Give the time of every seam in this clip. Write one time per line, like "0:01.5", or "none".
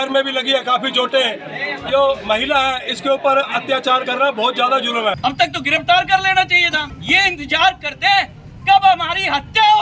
0:05.2
0:06.9